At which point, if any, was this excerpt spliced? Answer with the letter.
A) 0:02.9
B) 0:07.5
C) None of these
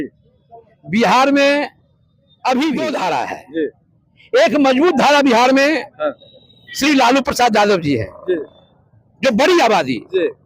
A